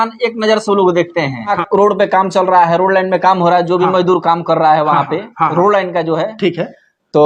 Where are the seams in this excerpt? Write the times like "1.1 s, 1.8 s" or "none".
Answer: 1.6 s